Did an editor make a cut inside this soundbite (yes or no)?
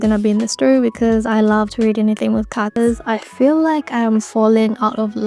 yes